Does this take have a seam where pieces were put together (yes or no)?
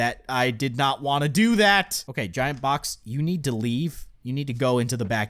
yes